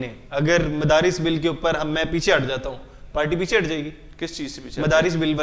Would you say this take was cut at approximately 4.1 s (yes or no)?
no